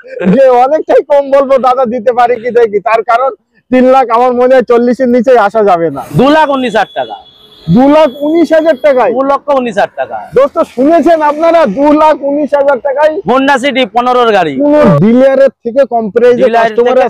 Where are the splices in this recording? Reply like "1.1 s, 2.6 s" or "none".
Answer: 6.0 s, 14.8 s